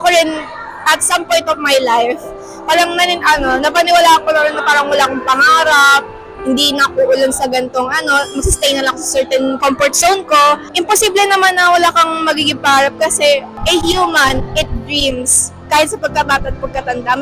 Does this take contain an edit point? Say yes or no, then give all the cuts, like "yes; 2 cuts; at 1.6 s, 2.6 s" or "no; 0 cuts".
yes; 3 cuts; at 9.6 s, 10.7 s, 13.5 s